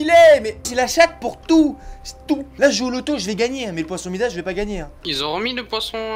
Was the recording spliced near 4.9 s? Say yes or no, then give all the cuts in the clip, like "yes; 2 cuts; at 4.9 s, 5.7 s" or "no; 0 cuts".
yes; 1 cut; at 4.9 s